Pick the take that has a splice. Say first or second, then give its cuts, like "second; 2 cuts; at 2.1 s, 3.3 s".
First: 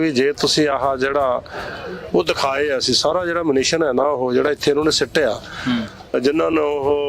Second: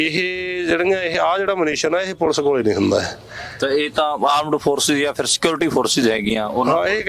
first; 1 cut; at 6.1 s